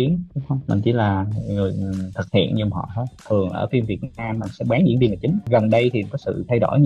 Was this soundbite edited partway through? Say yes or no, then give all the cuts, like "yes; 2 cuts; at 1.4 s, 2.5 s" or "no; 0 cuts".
yes; 2 cuts; at 3.2 s, 5.5 s